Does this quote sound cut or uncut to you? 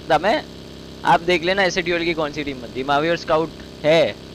uncut